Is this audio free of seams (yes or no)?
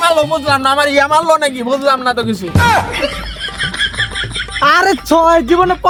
yes